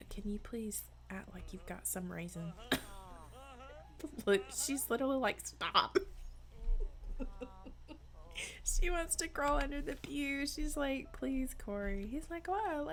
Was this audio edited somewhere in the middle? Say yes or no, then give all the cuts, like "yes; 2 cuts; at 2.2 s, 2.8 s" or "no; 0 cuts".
no; 0 cuts